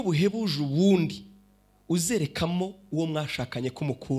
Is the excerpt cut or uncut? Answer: uncut